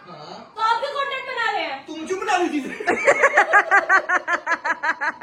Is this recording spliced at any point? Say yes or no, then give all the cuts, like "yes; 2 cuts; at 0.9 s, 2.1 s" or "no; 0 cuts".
no; 0 cuts